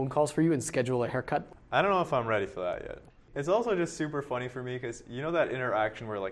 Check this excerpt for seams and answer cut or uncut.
cut